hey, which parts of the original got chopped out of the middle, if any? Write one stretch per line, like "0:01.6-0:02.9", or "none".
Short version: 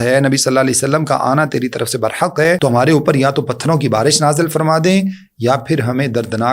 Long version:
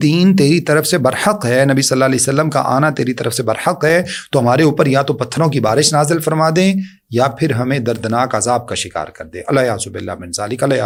0:04.0-0:04.3